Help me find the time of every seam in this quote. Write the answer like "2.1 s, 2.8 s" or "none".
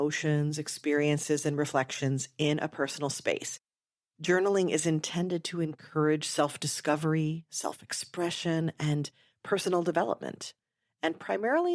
3.6 s